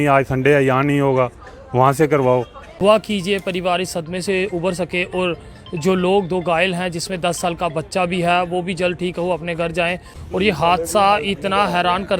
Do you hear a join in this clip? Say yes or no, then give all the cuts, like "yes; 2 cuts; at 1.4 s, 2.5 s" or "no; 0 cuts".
yes; 2 cuts; at 2.6 s, 10.1 s